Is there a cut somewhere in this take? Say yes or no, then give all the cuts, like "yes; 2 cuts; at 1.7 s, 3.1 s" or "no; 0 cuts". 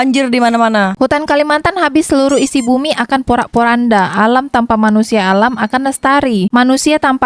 yes; 1 cut; at 0.9 s